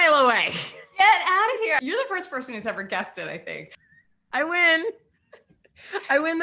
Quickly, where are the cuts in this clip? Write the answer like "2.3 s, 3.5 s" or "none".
1.8 s, 3.7 s